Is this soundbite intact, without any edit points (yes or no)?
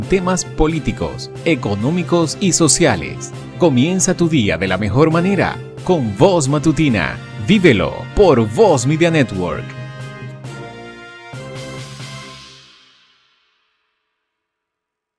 yes